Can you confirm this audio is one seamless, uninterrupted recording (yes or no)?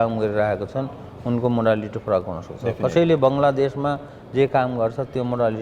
yes